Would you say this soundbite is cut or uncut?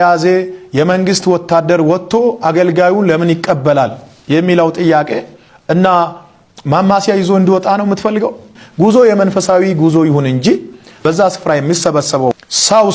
uncut